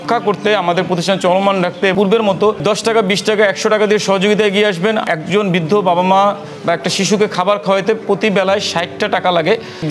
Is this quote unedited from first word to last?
no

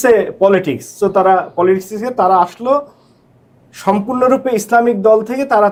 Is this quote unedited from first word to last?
yes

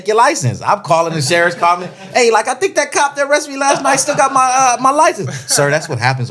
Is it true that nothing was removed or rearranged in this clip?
yes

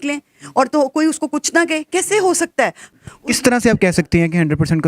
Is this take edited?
yes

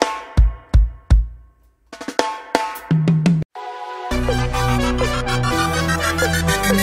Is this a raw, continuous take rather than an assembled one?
yes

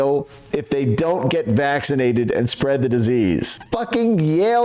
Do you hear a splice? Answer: yes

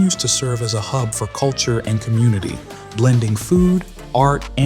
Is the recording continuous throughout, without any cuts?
yes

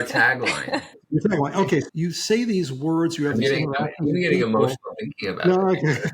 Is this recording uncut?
no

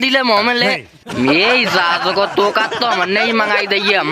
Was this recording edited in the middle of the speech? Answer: no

